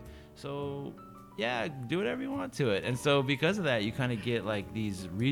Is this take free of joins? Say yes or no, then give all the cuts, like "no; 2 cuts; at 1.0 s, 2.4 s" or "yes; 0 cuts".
yes; 0 cuts